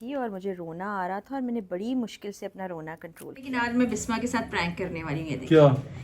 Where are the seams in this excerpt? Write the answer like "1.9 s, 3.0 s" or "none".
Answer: 3.5 s